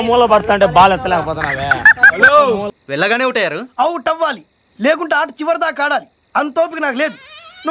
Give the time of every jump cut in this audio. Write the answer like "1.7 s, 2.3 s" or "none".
none